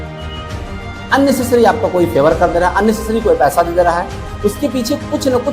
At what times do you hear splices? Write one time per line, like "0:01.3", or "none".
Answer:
0:01.1